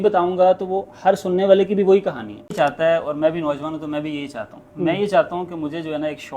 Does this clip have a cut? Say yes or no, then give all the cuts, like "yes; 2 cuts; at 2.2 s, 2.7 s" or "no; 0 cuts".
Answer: yes; 1 cut; at 2.5 s